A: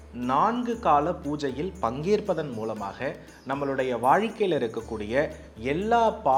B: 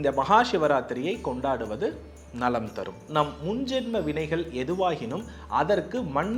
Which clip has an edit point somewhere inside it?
B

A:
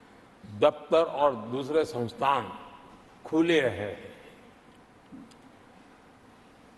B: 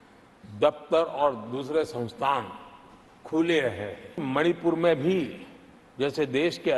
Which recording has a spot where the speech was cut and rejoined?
B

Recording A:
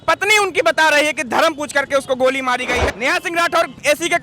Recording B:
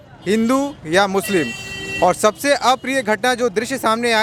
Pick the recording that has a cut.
A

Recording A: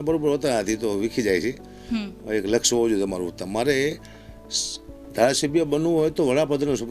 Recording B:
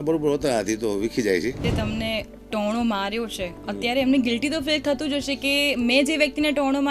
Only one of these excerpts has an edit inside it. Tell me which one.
B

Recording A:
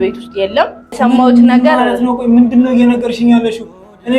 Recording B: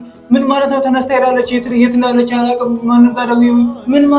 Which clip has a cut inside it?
A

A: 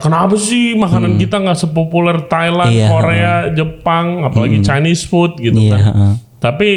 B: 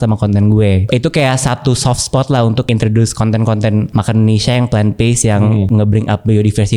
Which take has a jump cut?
B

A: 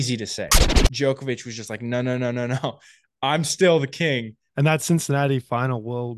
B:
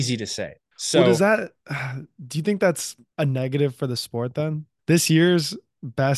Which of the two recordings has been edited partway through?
A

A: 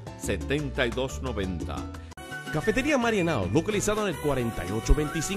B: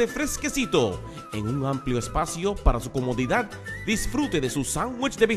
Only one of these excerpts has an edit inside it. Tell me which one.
A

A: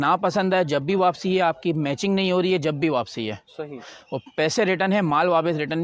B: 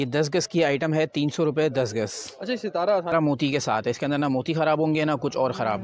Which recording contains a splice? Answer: B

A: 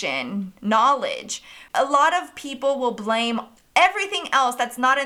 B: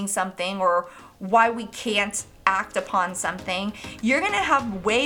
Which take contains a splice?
A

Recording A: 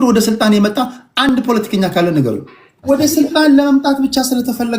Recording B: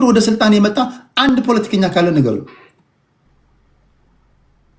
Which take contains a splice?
A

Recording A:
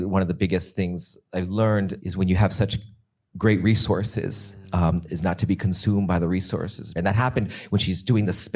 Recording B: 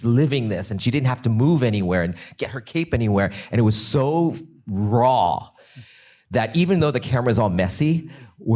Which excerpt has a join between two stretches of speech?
A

